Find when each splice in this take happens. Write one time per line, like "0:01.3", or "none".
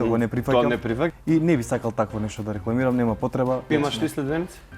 0:01.1
0:03.7